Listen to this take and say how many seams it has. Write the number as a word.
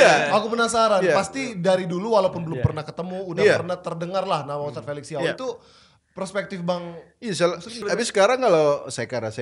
one